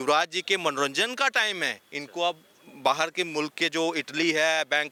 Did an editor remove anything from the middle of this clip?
no; 0 cuts

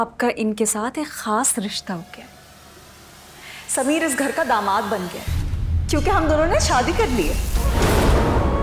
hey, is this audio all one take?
yes; 0 cuts

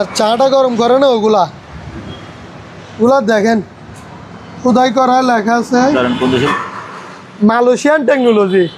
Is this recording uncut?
no; 1 cut; at 6.5 s

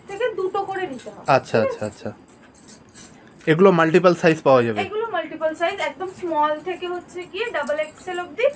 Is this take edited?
no; 0 cuts

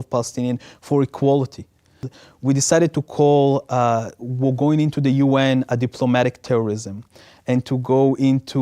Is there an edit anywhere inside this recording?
yes; 1 cut; at 2.1 s

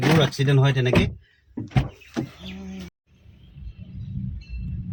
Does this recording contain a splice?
no; 0 cuts

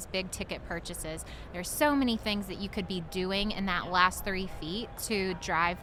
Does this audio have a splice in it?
no; 0 cuts

